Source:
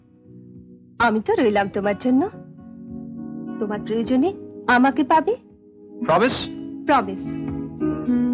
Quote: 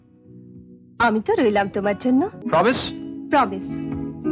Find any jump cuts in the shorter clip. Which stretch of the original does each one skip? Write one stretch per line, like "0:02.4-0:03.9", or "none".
0:02.4-0:05.9